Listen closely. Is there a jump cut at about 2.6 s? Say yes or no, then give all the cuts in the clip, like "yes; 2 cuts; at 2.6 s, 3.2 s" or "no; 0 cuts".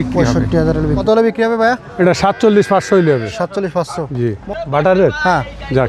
no; 2 cuts; at 1.0 s, 4.4 s